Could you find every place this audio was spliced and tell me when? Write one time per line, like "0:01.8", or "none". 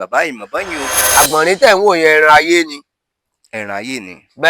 0:01.0